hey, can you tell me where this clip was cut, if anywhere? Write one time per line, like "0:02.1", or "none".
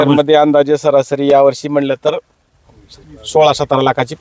none